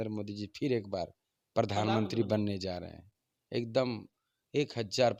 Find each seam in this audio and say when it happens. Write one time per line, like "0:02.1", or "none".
none